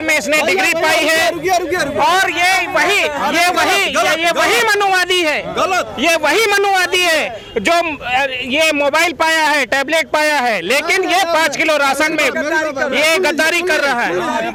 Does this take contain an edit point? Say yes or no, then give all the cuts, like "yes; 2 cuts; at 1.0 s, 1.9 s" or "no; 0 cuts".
no; 0 cuts